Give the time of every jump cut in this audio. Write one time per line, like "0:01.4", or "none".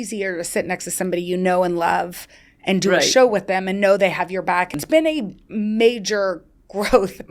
0:04.8